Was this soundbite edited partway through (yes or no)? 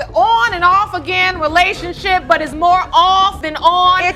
no